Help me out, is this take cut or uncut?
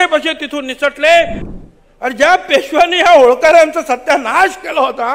cut